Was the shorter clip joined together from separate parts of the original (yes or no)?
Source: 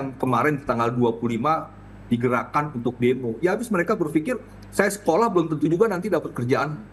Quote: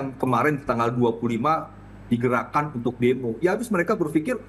no